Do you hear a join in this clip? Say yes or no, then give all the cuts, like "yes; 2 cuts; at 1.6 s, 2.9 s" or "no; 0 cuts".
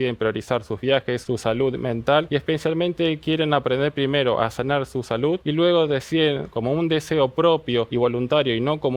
yes; 4 cuts; at 1.2 s, 2.3 s, 5.4 s, 7.9 s